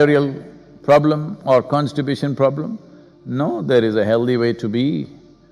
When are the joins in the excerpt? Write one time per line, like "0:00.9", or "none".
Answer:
none